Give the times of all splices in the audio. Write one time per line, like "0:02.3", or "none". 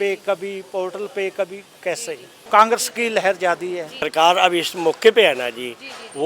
0:02.4
0:04.0